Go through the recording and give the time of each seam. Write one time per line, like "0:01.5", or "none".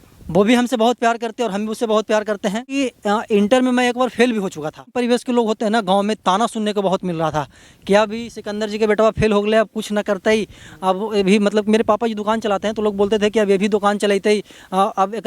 0:02.7
0:04.9